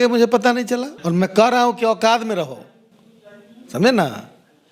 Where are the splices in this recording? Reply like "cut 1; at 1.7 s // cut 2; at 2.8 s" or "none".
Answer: cut 1; at 0.9 s